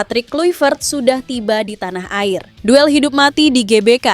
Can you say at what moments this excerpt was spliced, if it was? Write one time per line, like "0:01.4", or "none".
0:02.5